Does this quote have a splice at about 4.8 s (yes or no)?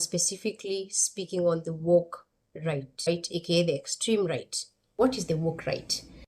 yes